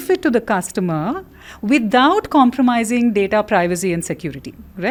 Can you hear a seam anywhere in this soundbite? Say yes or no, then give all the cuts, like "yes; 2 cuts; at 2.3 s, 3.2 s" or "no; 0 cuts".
no; 0 cuts